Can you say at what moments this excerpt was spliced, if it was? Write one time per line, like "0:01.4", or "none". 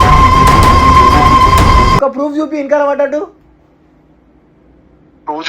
0:02.0